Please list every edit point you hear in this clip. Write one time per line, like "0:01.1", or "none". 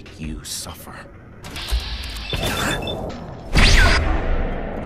0:01.4
0:03.1